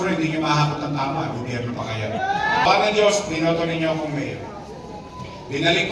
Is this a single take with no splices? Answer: no; 1 cut; at 2.7 s

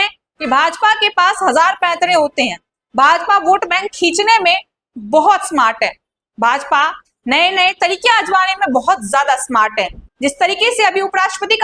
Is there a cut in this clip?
yes; 1 cut; at 10.1 s

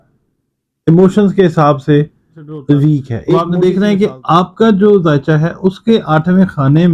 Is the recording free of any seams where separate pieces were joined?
no; 1 cut; at 3.4 s

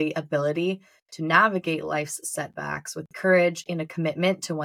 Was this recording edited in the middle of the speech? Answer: no; 0 cuts

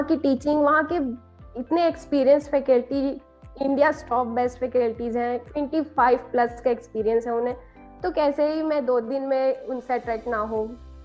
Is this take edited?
no; 0 cuts

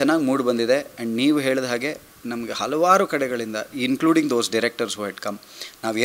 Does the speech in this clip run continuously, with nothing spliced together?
yes; 0 cuts

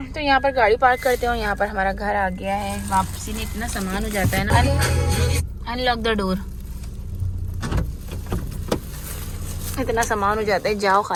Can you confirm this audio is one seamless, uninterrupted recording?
yes; 0 cuts

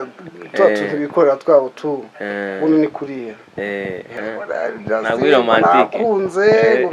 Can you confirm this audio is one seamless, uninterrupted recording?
no; 1 cut; at 4.1 s

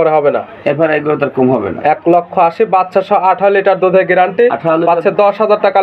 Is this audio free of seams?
yes; 0 cuts

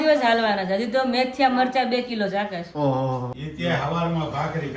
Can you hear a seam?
yes; 1 cut; at 3.4 s

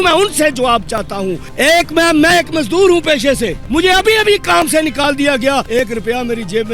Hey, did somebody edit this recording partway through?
yes; 3 cuts; at 1.4 s, 3.6 s, 5.7 s

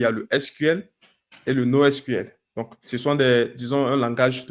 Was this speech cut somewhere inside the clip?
no; 0 cuts

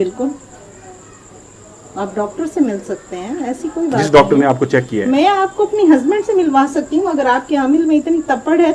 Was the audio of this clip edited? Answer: no; 0 cuts

